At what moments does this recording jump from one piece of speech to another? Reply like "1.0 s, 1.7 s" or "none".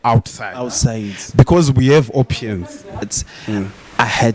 3.0 s